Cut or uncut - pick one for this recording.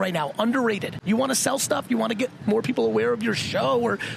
cut